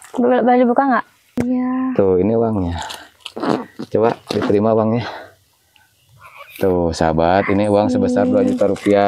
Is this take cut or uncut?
cut